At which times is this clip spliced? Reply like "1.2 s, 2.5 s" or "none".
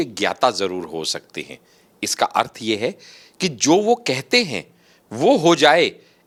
none

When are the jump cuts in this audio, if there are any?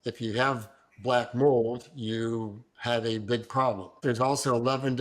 4.0 s

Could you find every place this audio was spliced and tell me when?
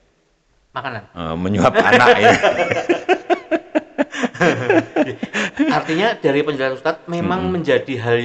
none

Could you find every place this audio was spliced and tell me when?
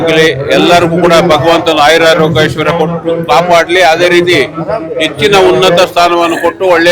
none

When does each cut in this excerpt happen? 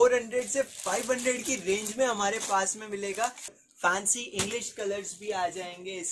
3.5 s

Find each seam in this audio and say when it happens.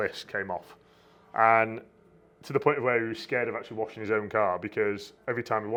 none

